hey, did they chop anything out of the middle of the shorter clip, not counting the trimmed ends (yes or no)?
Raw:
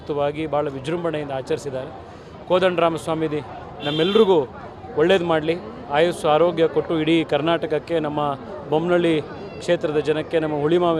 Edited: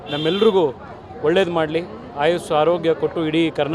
no